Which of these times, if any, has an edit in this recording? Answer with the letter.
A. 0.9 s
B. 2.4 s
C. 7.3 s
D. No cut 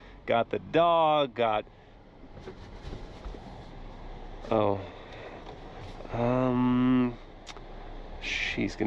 D